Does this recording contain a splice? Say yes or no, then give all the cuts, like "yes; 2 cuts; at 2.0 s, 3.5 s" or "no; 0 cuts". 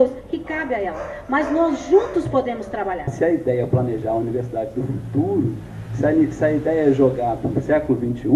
yes; 1 cut; at 3.1 s